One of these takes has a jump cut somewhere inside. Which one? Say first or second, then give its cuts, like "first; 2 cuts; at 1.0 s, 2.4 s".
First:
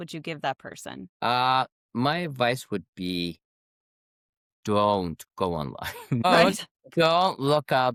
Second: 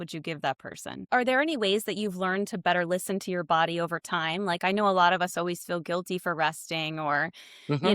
second; 1 cut; at 1.0 s